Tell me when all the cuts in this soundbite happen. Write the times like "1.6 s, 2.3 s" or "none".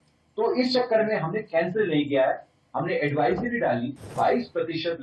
4.1 s